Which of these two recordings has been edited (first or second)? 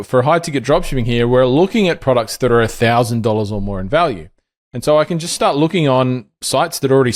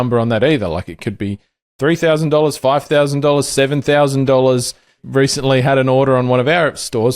second